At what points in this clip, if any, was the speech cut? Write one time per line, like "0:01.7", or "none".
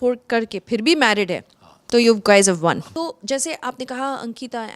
0:02.9